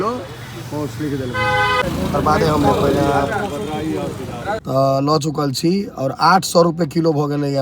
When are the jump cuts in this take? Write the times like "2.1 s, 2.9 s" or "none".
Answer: 1.8 s, 4.6 s